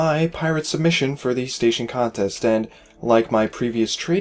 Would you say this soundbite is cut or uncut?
cut